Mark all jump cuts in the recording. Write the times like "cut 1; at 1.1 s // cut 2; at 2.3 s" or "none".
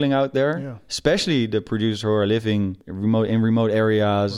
cut 1; at 2.8 s